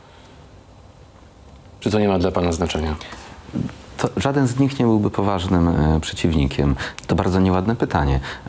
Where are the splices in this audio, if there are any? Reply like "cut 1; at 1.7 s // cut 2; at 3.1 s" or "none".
cut 1; at 6.9 s